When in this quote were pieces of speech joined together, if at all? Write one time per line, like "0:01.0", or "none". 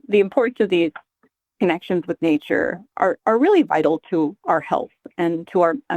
none